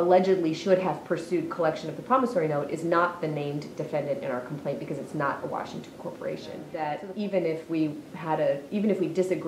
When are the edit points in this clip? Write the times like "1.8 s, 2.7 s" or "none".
6.7 s